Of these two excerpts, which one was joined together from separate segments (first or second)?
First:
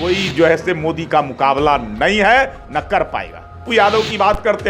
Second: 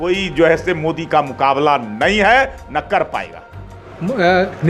first